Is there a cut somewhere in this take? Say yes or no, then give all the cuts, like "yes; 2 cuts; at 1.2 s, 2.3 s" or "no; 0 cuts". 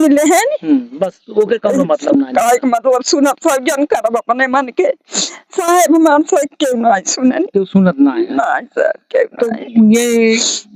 no; 0 cuts